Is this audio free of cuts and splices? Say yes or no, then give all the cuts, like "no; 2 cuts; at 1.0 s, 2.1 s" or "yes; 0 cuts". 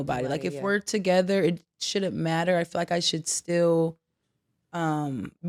yes; 0 cuts